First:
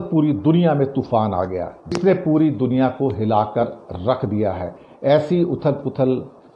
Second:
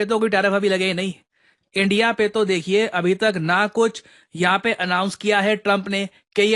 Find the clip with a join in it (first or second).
first